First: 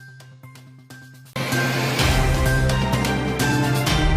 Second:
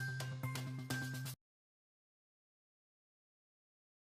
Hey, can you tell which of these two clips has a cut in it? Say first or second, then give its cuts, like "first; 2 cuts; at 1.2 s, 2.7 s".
first; 1 cut; at 0.9 s